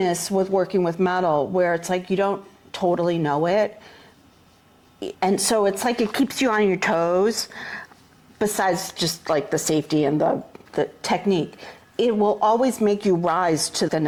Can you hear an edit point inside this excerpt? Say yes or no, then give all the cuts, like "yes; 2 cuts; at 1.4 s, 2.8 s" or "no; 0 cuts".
no; 0 cuts